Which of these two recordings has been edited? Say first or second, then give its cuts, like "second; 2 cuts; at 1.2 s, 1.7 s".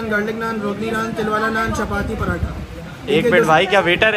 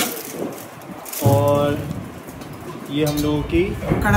first; 1 cut; at 2.7 s